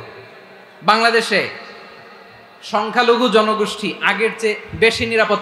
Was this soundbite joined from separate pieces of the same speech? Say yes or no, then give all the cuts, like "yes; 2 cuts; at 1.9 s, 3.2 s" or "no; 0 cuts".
no; 0 cuts